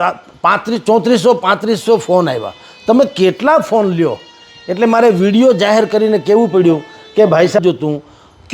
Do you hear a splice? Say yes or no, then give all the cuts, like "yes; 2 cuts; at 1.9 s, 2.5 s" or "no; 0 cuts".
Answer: yes; 1 cut; at 7.6 s